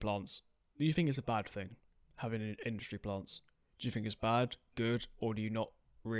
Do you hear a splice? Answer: no; 0 cuts

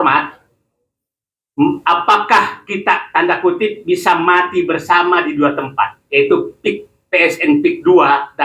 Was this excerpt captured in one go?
yes; 0 cuts

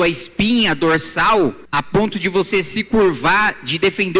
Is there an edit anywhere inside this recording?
yes; 1 cut; at 1.6 s

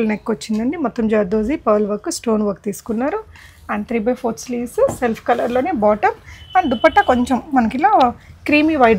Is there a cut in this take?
no; 0 cuts

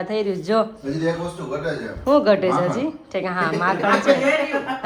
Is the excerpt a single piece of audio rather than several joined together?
yes; 0 cuts

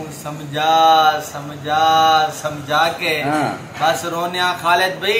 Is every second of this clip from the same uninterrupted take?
yes; 0 cuts

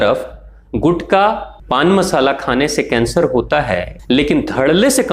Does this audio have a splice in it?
yes; 2 cuts; at 1.5 s, 3.9 s

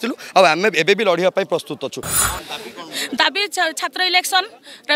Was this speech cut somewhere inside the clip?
yes; 1 cut; at 2.1 s

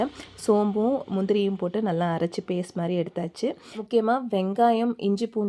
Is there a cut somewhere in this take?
yes; 1 cut; at 3.7 s

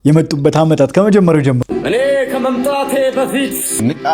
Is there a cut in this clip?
yes; 1 cut; at 1.6 s

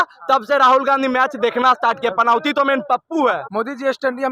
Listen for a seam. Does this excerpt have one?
no; 0 cuts

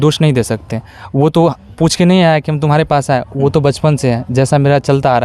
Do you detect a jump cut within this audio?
no; 0 cuts

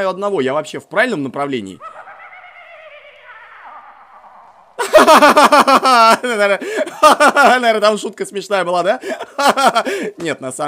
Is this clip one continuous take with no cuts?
yes; 0 cuts

